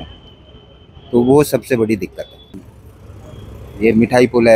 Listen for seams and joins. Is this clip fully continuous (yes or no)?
no